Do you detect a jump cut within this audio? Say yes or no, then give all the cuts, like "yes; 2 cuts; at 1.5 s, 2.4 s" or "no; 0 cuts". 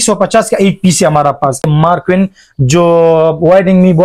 yes; 1 cut; at 1.6 s